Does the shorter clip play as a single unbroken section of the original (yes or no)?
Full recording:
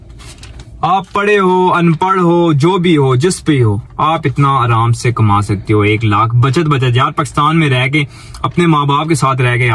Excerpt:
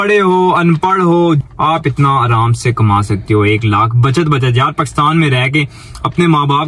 no